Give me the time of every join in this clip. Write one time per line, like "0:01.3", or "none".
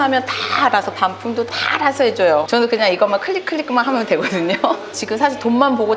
0:02.5
0:04.9